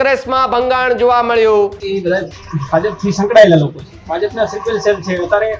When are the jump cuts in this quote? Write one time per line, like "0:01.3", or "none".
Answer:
0:01.8
0:03.9